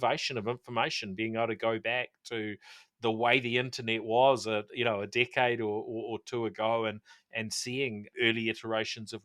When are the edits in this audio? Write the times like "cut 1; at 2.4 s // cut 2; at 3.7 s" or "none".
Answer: cut 1; at 8.1 s